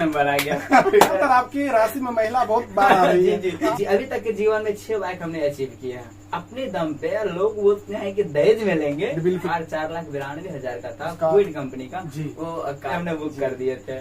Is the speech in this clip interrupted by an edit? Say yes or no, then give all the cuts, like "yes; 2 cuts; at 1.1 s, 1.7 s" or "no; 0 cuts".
yes; 4 cuts; at 1.1 s, 3.6 s, 9.5 s, 13.0 s